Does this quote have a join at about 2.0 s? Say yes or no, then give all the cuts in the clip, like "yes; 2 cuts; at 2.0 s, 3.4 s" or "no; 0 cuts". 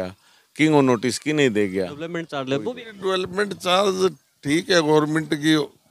yes; 1 cut; at 2.0 s